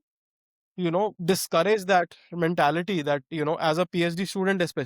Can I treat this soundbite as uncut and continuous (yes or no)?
no